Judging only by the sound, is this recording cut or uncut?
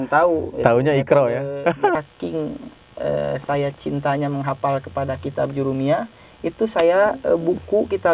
cut